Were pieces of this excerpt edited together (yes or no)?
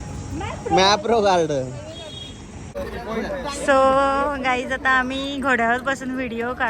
yes